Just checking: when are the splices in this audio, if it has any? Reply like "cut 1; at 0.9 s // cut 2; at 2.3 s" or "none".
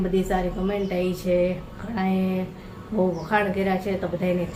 none